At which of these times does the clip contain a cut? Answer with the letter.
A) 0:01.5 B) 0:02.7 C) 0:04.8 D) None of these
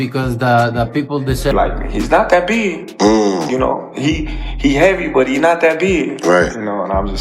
A